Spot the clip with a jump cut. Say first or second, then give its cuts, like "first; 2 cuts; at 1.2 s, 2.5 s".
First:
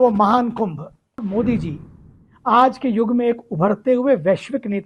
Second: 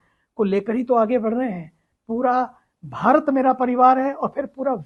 first; 1 cut; at 1.2 s